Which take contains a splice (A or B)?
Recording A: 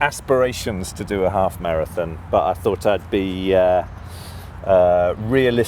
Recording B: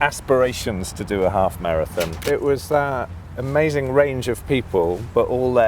B